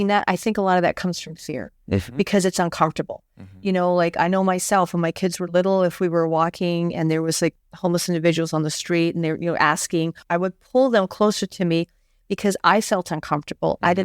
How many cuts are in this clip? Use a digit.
2